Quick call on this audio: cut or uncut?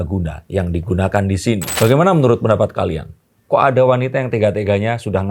cut